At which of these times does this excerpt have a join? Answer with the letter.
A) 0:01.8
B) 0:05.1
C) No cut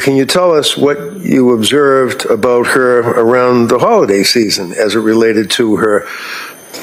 C